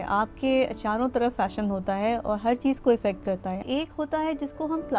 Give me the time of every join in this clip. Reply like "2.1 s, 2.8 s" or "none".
3.6 s